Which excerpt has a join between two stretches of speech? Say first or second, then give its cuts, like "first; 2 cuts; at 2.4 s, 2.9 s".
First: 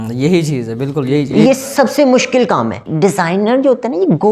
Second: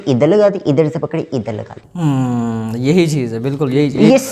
first; 1 cut; at 2.9 s